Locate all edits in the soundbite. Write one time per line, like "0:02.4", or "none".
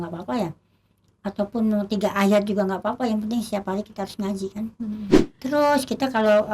0:05.2